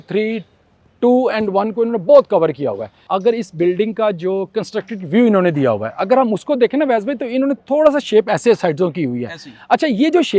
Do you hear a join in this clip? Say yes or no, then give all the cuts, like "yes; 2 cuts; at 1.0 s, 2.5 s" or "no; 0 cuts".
yes; 1 cut; at 2.9 s